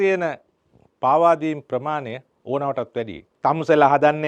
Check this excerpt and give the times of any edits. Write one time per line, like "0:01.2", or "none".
0:03.2